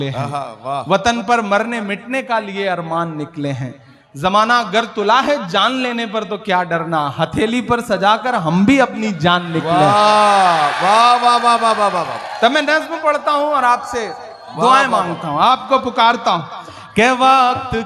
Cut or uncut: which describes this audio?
uncut